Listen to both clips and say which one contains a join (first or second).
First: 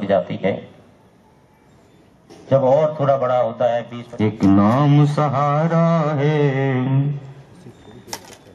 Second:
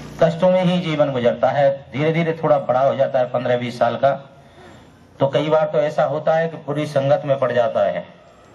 first